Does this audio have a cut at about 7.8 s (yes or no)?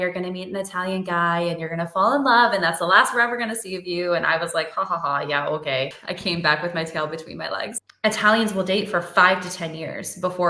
yes